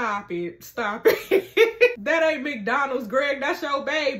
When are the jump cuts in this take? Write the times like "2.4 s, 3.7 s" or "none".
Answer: 2.0 s